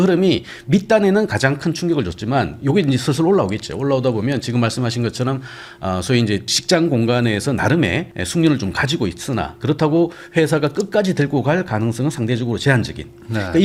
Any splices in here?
no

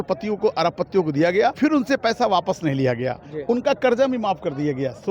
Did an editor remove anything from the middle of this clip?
yes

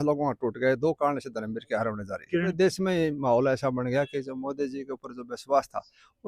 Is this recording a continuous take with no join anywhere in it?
no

